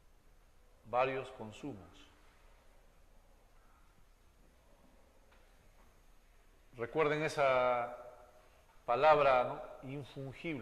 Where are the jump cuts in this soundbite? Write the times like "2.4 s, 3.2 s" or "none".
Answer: 1.0 s